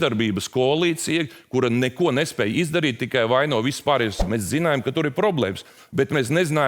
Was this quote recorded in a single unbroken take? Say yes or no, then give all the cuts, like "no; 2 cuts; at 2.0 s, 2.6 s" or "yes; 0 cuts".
no; 1 cut; at 4.2 s